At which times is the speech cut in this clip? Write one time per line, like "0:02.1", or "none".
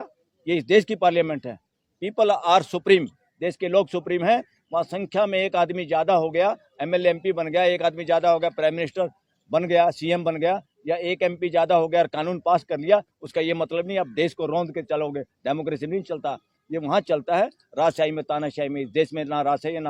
none